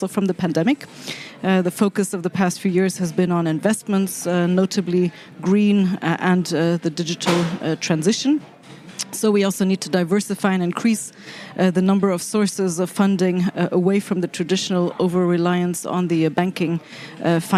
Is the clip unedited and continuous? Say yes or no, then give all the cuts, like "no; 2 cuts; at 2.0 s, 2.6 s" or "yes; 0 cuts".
yes; 0 cuts